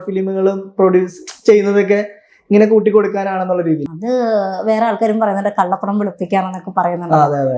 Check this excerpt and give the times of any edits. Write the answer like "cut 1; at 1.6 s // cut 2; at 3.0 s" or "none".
cut 1; at 3.9 s